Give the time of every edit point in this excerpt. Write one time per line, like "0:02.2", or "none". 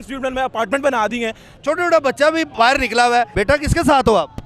0:01.5
0:03.3